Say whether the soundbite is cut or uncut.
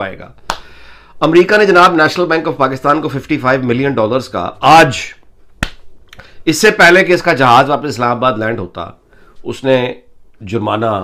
uncut